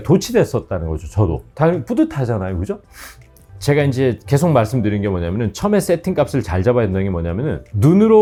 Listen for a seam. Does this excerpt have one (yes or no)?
no